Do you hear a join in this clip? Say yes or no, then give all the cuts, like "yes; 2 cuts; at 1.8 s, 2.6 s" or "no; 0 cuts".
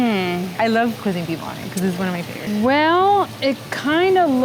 yes; 2 cuts; at 1.0 s, 2.4 s